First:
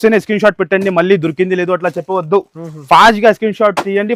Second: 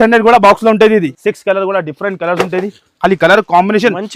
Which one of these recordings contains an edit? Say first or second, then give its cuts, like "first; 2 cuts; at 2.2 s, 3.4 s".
second; 1 cut; at 1.2 s